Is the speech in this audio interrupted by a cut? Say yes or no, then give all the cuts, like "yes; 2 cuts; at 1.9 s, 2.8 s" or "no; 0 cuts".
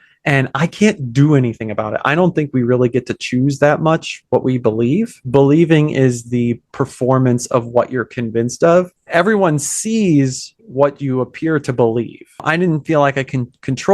no; 0 cuts